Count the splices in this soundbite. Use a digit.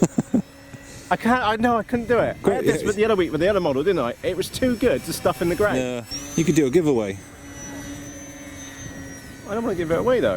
1